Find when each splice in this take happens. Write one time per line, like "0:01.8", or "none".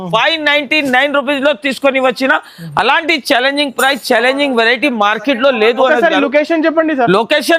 none

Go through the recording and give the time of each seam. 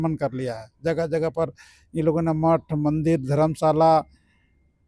none

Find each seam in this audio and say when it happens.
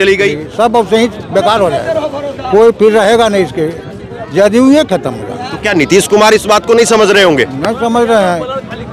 none

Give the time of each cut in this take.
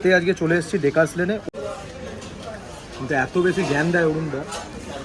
0:01.4

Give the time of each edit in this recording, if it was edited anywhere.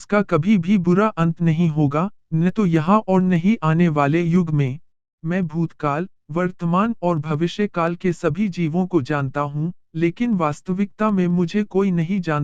0:05.1

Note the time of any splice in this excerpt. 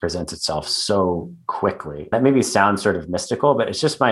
0:02.1

